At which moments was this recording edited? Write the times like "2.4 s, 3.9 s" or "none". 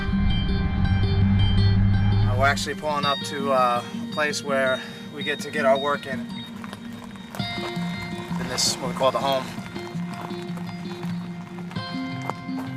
3.4 s